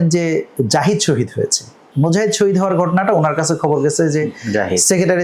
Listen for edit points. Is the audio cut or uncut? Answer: cut